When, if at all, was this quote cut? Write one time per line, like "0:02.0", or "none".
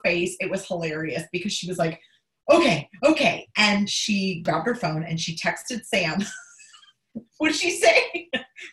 0:04.4